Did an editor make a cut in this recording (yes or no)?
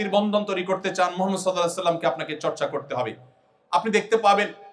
no